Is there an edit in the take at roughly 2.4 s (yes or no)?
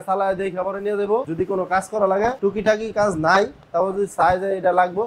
yes